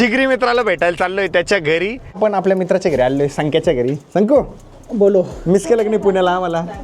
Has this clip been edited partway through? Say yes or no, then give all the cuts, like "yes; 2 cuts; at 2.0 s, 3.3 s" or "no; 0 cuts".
yes; 1 cut; at 2.1 s